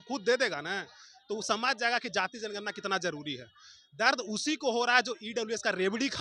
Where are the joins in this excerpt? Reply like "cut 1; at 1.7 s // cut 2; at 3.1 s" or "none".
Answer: none